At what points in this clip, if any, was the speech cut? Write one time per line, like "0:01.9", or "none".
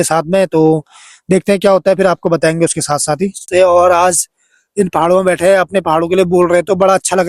0:03.4